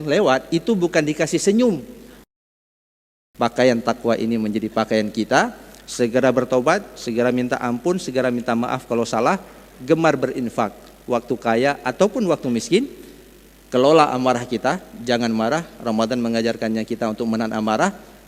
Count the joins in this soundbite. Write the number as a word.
one